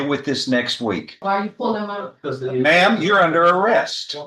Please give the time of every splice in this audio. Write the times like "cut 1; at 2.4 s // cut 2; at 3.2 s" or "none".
cut 1; at 1.2 s